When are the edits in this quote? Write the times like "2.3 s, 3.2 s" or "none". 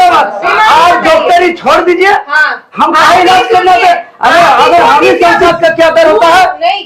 5.4 s